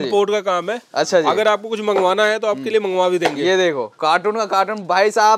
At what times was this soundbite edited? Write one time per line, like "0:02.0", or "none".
none